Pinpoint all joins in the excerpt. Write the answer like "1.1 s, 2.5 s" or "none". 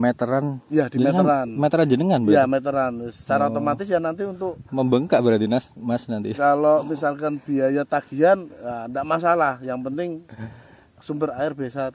none